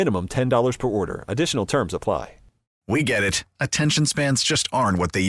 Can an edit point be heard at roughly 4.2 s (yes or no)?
no